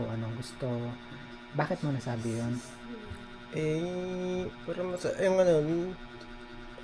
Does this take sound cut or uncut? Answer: uncut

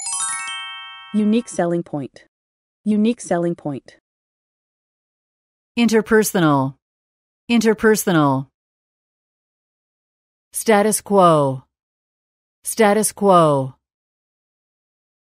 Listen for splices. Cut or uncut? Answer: cut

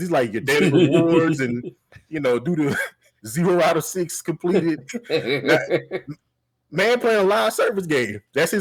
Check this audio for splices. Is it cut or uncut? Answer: uncut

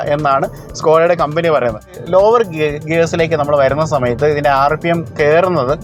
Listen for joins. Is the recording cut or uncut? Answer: cut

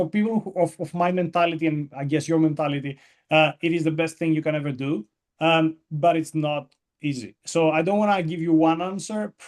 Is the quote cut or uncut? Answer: uncut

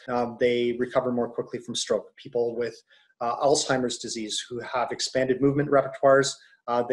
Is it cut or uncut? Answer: uncut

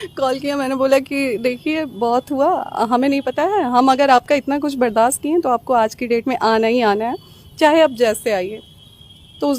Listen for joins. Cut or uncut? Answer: uncut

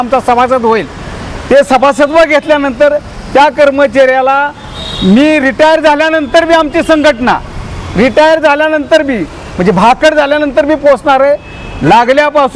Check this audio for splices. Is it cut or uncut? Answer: uncut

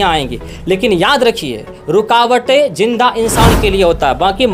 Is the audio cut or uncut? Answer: uncut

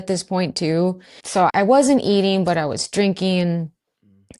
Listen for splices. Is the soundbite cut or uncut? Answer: cut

